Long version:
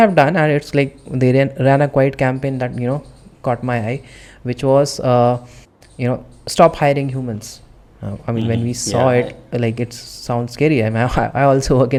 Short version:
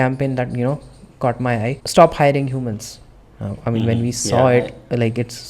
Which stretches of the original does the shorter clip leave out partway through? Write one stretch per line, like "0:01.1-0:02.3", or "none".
0:04.0-0:06.4